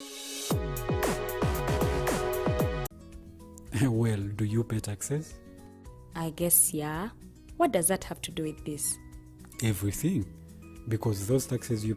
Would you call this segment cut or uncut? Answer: cut